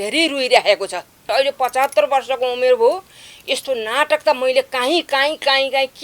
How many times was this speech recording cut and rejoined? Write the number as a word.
one